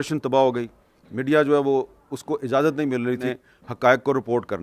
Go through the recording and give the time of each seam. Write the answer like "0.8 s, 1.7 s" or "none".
3.3 s